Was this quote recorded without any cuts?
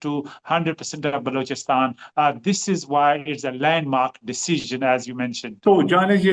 yes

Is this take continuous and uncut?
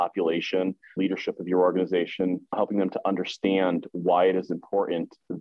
no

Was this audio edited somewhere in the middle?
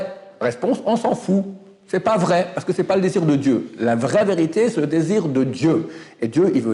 no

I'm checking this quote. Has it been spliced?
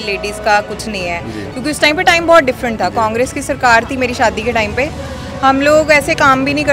no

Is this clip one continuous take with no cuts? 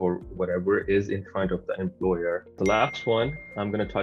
no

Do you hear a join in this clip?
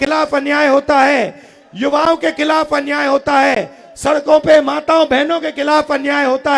no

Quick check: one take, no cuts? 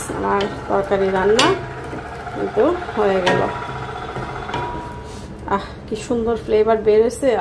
yes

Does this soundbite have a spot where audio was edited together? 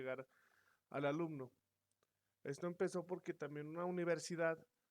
yes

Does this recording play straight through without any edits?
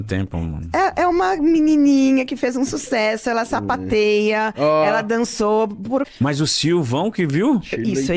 no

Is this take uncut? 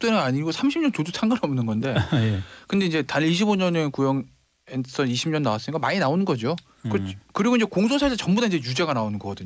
no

